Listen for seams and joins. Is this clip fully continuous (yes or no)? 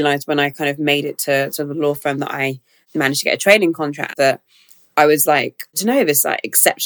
yes